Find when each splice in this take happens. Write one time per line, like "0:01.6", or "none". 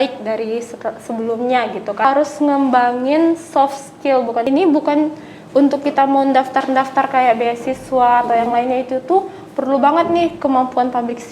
0:02.0
0:04.5